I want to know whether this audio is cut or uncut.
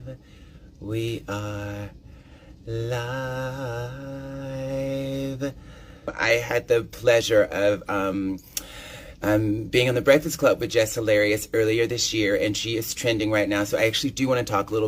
uncut